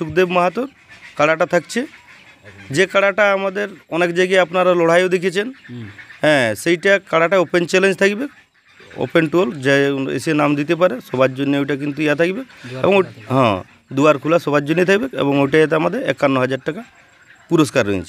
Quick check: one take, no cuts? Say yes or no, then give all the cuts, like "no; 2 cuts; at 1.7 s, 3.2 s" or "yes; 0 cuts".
yes; 0 cuts